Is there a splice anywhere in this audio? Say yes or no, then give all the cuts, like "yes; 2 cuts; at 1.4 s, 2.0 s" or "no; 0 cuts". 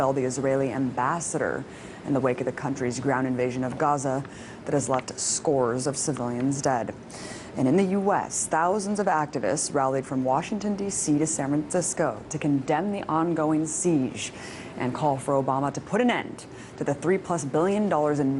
yes; 1 cut; at 3.4 s